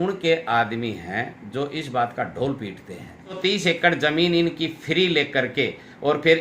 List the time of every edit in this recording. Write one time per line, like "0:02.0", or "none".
0:03.4

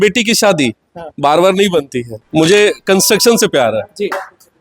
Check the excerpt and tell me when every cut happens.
0:02.1

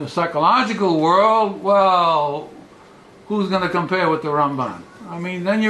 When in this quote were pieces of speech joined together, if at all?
0:04.1

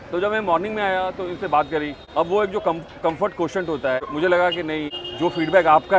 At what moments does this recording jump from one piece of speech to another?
0:02.0
0:04.0
0:05.0

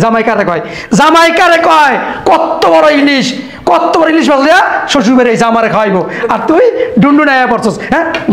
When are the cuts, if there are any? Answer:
none

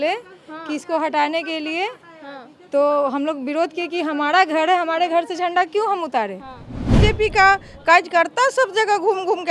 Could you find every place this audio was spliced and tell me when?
0:07.0

